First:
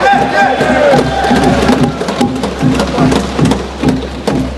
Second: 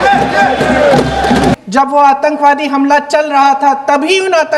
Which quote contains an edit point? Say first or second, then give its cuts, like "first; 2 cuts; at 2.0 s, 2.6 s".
second; 1 cut; at 1.6 s